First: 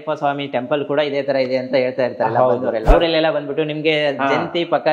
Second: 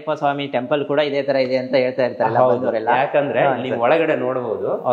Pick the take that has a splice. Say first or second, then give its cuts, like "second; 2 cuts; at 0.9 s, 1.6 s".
first; 1 cut; at 2.8 s